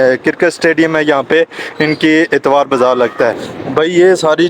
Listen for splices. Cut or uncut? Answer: cut